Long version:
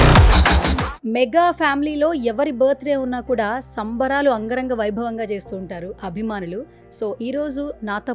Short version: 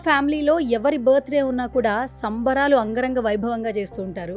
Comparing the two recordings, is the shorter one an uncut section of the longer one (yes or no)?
yes